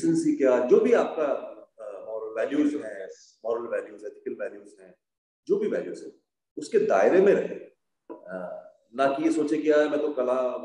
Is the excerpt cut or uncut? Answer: uncut